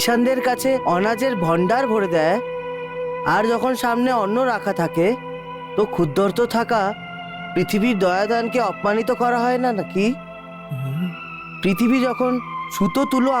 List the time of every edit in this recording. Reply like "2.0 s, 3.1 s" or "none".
11.3 s